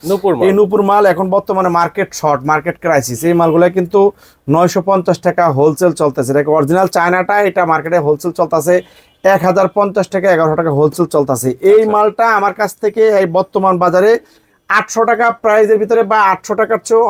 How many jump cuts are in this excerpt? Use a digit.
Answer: 0